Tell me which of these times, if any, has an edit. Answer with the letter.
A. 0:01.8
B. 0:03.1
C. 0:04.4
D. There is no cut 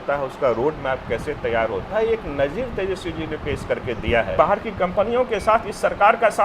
C